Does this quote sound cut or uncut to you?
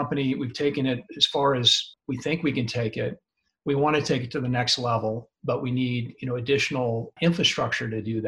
cut